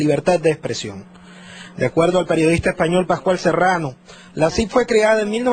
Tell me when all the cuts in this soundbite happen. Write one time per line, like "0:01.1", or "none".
0:03.2